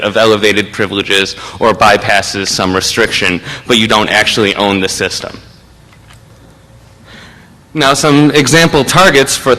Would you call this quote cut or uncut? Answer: uncut